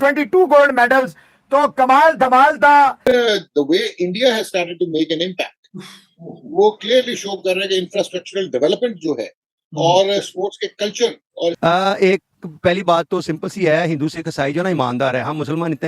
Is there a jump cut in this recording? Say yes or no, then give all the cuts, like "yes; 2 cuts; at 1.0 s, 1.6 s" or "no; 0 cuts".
yes; 2 cuts; at 3.0 s, 11.6 s